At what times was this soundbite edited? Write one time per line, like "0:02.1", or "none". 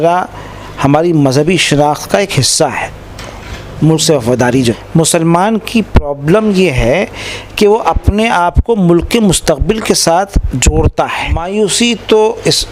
0:04.8
0:11.4